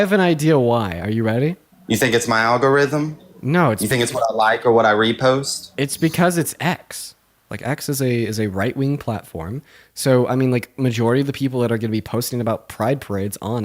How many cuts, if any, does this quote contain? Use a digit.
1